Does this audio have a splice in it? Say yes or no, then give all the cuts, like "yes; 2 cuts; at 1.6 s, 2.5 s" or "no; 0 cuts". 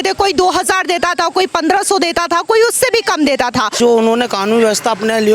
yes; 1 cut; at 3.8 s